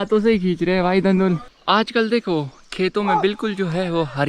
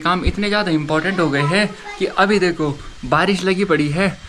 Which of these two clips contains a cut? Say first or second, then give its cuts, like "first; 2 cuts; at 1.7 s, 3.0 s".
first; 1 cut; at 1.5 s